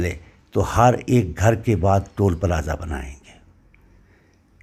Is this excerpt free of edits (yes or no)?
yes